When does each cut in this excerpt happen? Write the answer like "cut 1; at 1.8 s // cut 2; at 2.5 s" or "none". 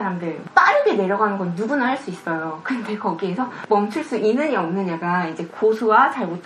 none